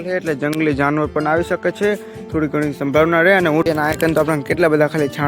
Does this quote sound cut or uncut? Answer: cut